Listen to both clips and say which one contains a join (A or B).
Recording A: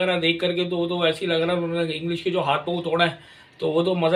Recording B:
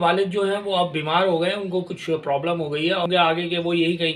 B